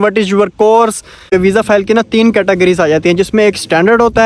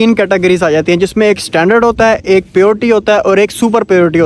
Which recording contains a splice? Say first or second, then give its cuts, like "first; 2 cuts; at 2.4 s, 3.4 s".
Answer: first; 1 cut; at 1.3 s